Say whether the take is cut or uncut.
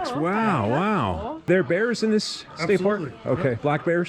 cut